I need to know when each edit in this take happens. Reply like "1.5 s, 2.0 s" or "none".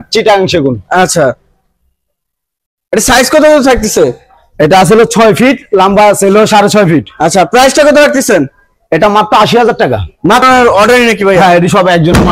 10.4 s